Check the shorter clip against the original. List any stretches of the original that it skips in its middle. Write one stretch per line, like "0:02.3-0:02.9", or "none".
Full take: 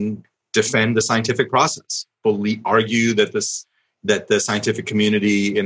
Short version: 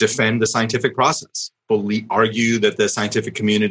0:03.3-0:04.3